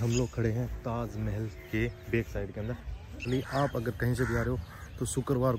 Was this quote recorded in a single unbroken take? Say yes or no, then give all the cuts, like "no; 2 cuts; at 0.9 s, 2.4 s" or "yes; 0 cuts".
no; 1 cut; at 3.2 s